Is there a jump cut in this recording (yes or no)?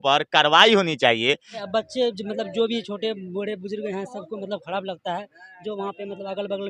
yes